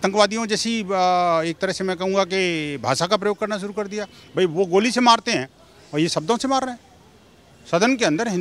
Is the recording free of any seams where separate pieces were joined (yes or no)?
yes